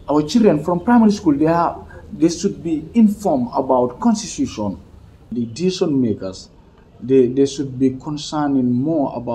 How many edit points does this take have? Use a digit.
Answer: 1